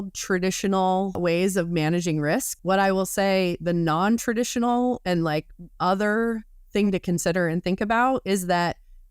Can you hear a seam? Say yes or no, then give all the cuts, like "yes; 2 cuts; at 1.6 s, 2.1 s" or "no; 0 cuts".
yes; 2 cuts; at 1.2 s, 2.5 s